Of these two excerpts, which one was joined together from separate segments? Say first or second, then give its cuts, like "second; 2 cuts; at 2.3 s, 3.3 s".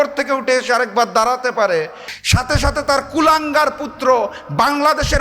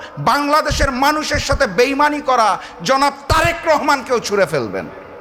first; 1 cut; at 2.1 s